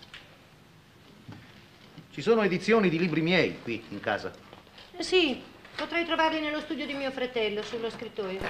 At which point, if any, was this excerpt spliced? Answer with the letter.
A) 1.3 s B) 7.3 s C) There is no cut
B